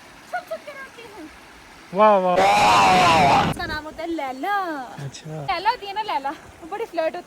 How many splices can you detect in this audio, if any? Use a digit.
2